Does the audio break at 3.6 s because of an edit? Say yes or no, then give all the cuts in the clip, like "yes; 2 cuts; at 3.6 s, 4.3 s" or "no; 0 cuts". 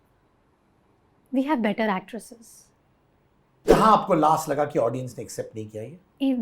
yes; 1 cut; at 3.6 s